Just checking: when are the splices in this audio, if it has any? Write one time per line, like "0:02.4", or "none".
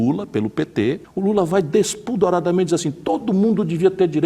0:01.1

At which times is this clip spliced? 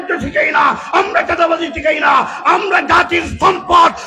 none

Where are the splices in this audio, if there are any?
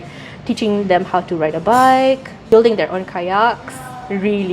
0:02.3

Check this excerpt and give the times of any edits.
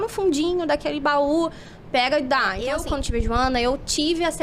0:02.8

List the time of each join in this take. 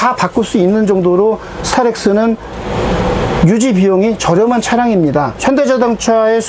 none

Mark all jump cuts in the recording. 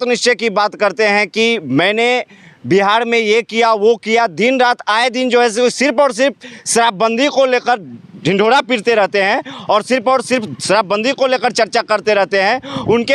none

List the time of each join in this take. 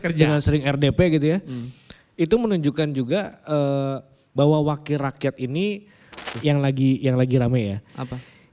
0:06.3

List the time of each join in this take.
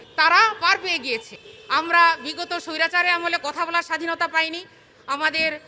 0:01.4

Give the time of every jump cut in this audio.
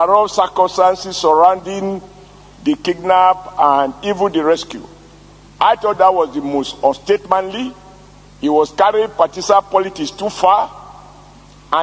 none

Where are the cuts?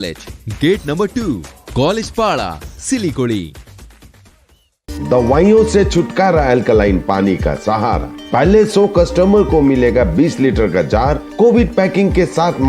none

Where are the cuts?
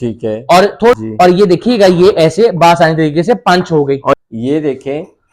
0:01.0
0:04.1

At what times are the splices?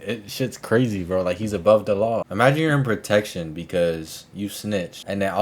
0:02.3

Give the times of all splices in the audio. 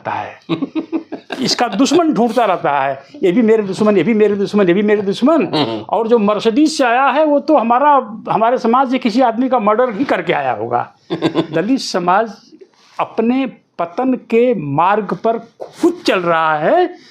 0:11.5

